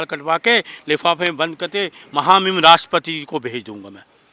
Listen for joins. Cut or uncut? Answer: uncut